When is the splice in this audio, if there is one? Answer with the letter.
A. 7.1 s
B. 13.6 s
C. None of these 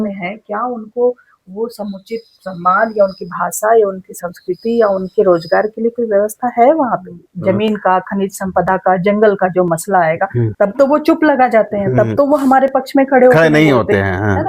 A